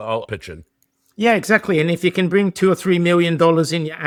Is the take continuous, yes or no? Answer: yes